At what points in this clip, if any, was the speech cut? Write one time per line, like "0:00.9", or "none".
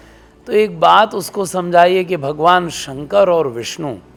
none